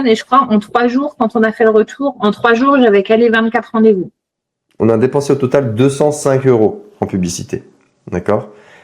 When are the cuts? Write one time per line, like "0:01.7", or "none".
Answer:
0:04.7